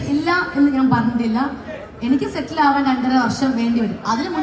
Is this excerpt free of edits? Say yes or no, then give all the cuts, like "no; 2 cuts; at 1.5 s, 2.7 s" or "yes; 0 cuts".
no; 1 cut; at 1.4 s